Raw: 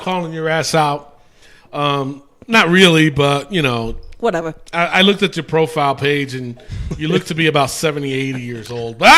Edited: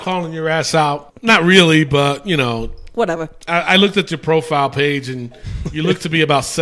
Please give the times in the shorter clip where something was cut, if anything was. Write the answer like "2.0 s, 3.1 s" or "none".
1.1 s